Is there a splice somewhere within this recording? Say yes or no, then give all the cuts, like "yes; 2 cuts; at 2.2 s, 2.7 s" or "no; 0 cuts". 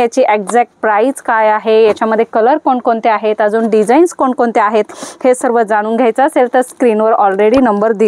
no; 0 cuts